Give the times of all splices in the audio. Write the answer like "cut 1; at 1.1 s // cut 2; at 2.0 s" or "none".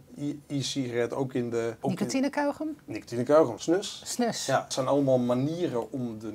cut 1; at 1.8 s // cut 2; at 3.6 s // cut 3; at 4.7 s